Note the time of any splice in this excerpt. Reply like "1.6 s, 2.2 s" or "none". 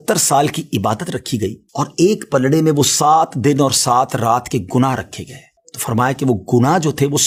none

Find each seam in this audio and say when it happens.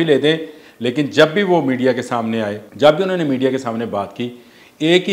2.6 s

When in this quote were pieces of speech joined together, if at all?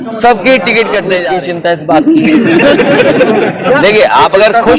1.3 s

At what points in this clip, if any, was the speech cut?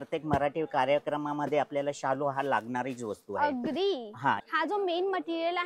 4.4 s

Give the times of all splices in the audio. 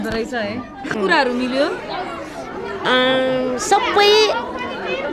0.9 s

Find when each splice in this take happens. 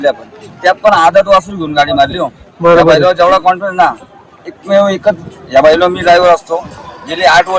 none

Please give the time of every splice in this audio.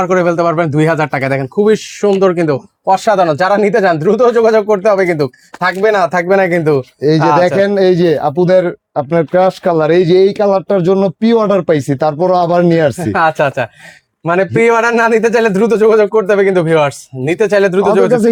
none

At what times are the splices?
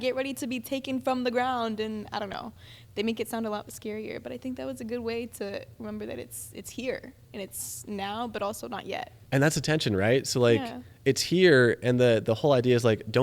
9.2 s

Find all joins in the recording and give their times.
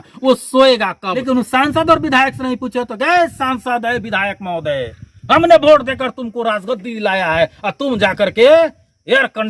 1.2 s

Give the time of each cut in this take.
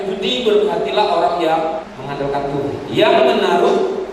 1.9 s

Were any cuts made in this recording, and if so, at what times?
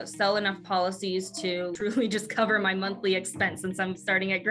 1.7 s

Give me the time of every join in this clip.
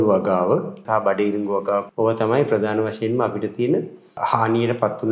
0.8 s, 1.9 s, 4.2 s

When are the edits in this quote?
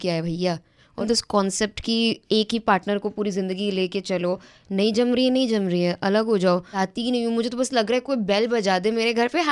1.0 s, 6.8 s

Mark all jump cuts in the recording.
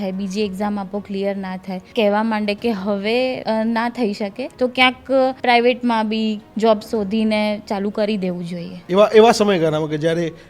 1.8 s, 3.4 s, 4.4 s, 5.4 s, 8.7 s

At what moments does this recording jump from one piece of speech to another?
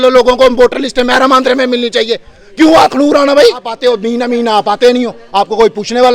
3.7 s

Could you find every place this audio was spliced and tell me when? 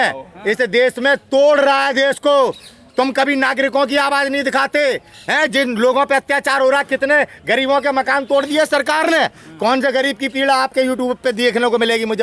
none

